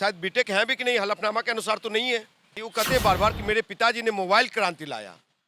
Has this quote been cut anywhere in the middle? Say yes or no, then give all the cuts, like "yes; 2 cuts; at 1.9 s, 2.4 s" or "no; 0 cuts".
yes; 1 cut; at 2.6 s